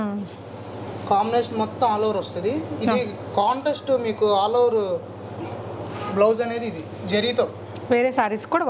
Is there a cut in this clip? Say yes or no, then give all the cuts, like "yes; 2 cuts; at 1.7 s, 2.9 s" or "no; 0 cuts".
no; 0 cuts